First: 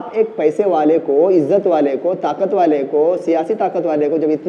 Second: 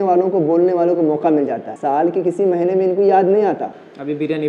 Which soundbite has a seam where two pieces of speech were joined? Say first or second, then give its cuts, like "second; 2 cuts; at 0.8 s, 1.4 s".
second; 1 cut; at 1.7 s